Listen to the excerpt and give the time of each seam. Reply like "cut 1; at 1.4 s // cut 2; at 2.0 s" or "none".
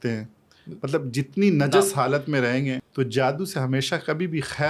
cut 1; at 2.8 s

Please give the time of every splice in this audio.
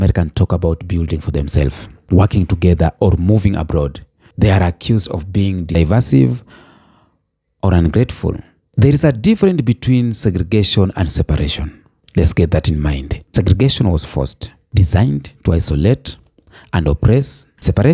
cut 1; at 5.8 s // cut 2; at 13.2 s

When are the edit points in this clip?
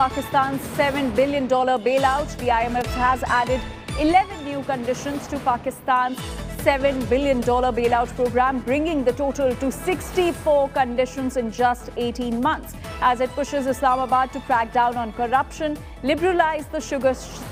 none

